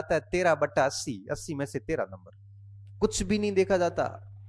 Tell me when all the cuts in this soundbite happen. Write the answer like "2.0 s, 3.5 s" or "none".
none